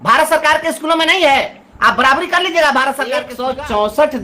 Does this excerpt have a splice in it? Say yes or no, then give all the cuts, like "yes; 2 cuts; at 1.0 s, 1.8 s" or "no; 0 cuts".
yes; 1 cut; at 3.3 s